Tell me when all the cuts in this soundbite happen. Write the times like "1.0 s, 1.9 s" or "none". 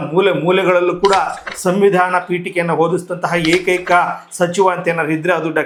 none